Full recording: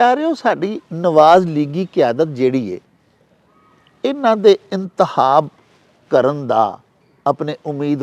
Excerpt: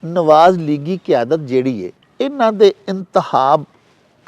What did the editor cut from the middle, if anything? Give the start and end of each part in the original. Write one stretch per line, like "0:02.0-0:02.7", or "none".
0:02.8-0:03.8

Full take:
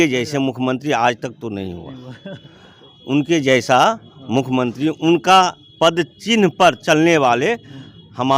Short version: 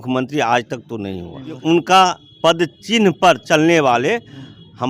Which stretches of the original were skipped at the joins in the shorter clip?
0:02.1-0:05.0

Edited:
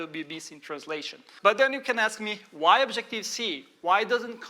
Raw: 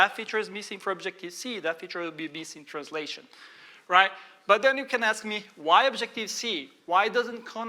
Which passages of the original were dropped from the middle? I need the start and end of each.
0:03.3-0:04.3

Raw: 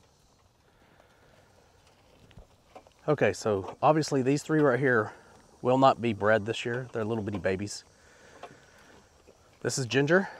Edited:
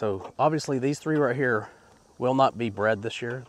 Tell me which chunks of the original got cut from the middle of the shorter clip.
none

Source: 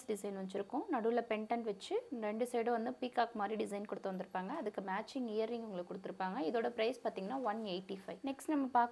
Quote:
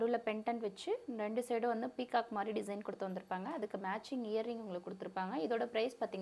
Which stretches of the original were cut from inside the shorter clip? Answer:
none

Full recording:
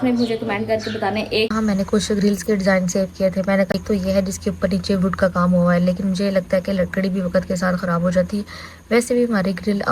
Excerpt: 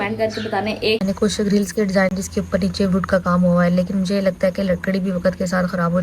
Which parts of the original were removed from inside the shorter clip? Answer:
0:01.5-0:01.7
0:02.9-0:04.3

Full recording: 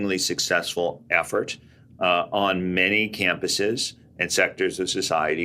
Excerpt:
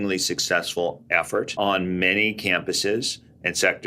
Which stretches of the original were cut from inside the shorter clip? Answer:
0:01.5-0:02.3

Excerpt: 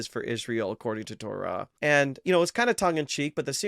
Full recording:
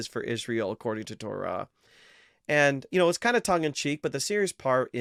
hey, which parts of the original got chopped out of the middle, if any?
0:01.7-0:02.4

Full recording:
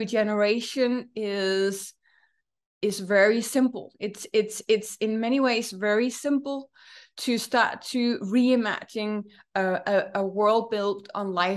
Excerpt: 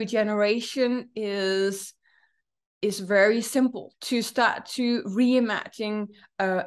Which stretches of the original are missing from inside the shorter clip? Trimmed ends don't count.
0:03.9-0:07.1

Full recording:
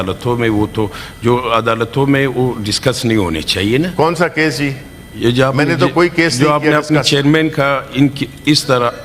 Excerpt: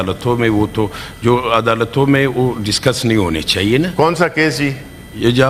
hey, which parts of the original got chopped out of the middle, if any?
none

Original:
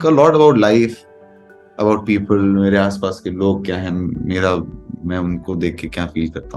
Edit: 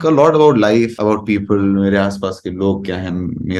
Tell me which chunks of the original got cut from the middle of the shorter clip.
0:00.9-0:01.7

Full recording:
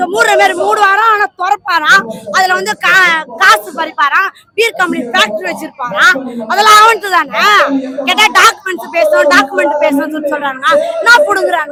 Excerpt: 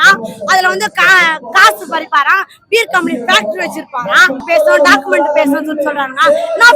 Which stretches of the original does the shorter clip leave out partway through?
0:06.3-0:08.9

